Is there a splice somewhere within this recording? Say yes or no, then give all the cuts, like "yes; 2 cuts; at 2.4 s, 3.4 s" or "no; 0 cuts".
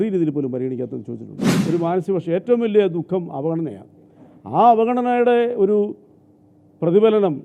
yes; 1 cut; at 1.5 s